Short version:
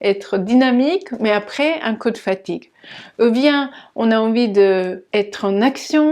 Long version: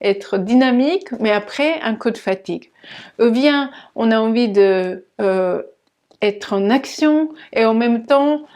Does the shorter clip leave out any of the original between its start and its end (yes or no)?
yes